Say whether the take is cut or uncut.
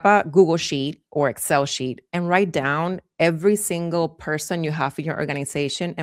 uncut